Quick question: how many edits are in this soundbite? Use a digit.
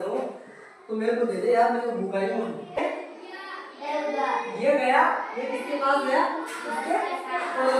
1